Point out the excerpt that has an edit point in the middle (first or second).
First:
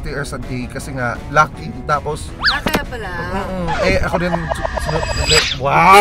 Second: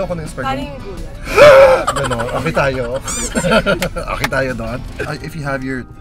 second